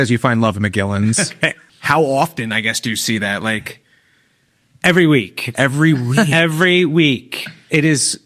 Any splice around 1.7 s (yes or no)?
yes